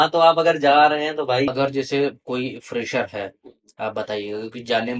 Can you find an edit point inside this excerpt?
yes; 1 cut; at 1.5 s

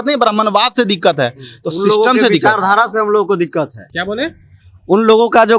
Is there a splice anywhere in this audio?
no; 0 cuts

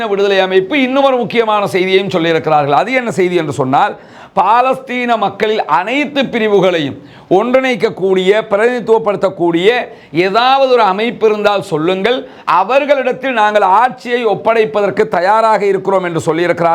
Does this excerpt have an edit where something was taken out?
no; 0 cuts

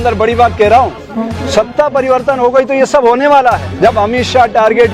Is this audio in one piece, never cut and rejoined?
no; 1 cut; at 3.7 s

